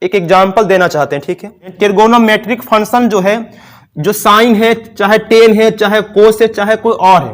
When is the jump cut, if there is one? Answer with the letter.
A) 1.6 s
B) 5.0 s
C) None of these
A